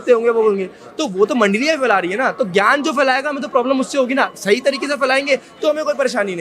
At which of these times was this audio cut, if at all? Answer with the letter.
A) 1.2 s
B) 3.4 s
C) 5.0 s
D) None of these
D